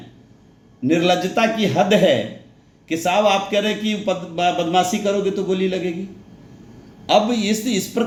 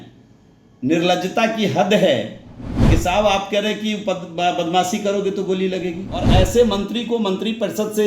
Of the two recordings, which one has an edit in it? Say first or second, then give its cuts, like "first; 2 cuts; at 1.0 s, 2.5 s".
second; 1 cut; at 6.3 s